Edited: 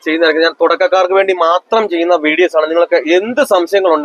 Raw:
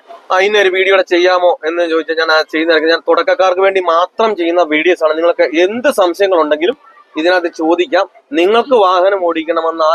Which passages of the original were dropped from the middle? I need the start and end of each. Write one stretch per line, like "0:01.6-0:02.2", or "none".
none